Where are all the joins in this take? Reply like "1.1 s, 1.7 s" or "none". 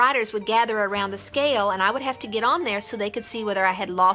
none